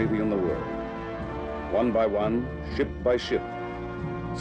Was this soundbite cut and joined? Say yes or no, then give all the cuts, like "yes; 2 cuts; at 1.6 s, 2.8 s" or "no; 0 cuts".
no; 0 cuts